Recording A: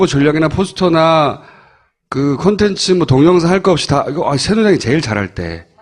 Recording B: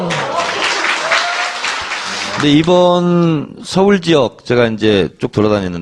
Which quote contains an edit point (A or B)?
B